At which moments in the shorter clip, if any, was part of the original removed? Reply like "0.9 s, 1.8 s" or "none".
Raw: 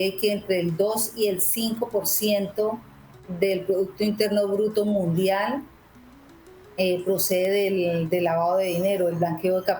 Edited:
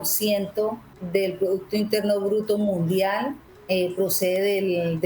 0.9 s, 3.5 s

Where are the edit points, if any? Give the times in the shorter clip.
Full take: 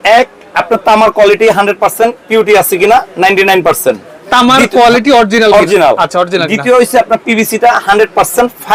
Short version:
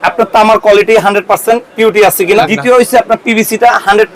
2.5 s

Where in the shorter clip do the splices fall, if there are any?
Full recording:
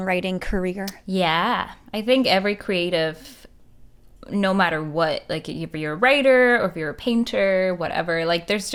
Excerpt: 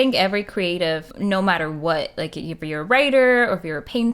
1.1 s

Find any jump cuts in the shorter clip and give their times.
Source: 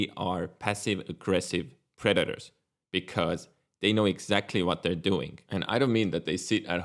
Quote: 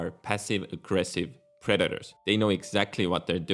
2.1 s

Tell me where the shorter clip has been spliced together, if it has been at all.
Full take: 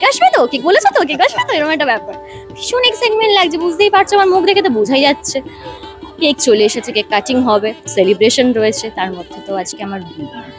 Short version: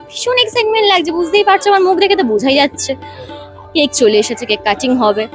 none

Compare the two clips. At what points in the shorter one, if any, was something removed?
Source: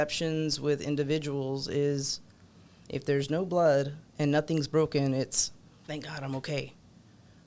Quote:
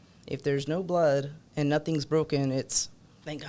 none

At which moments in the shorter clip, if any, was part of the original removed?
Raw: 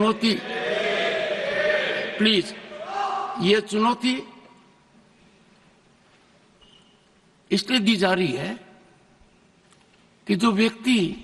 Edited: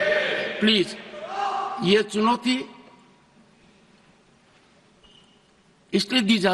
none

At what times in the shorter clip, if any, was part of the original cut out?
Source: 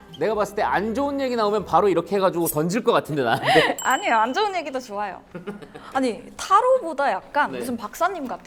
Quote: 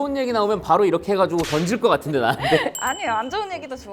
none

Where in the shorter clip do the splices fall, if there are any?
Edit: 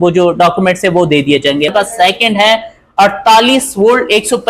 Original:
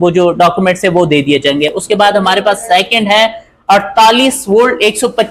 1.7 s

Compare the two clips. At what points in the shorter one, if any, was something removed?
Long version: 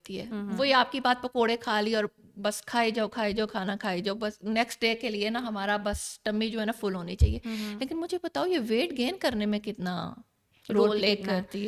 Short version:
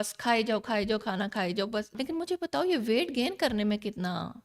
1.9 s

